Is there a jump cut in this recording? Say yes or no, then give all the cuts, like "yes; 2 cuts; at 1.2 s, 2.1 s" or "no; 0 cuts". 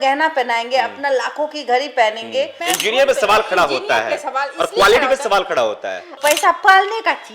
yes; 2 cuts; at 2.6 s, 6.1 s